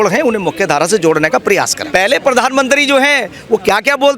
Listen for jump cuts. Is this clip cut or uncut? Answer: cut